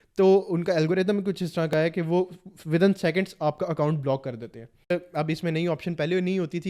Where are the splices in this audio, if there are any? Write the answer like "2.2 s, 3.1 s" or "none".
4.9 s